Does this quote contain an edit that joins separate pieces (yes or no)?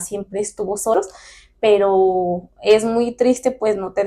yes